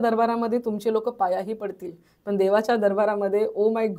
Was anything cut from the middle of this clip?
no; 0 cuts

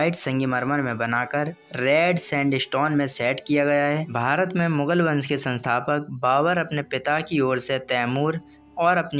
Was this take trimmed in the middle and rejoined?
yes; 1 cut; at 4.1 s

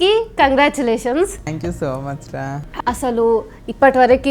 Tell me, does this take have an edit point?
yes; 2 cuts; at 1.5 s, 2.6 s

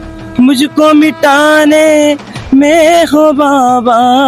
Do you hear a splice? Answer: no; 0 cuts

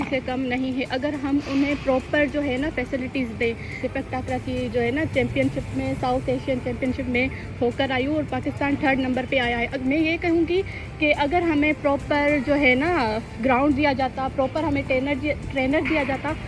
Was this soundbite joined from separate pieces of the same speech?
no; 0 cuts

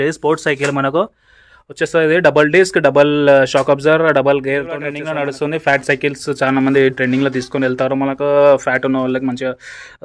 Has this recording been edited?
yes; 1 cut; at 5.0 s

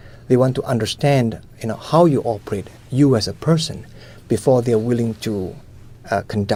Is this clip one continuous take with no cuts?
yes; 0 cuts

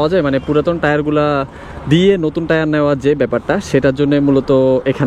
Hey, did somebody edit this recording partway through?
no; 0 cuts

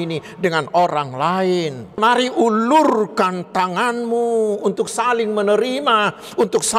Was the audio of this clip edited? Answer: yes; 1 cut; at 2.0 s

